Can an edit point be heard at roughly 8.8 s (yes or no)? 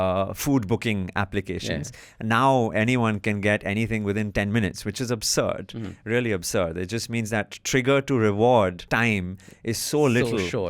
yes